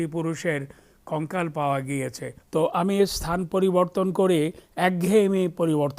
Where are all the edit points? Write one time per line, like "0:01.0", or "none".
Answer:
0:02.3